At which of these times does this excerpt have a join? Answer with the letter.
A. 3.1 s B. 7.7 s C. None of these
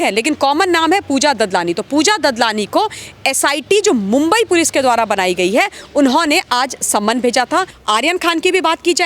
B